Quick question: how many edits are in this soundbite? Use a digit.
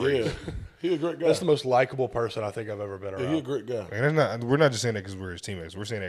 0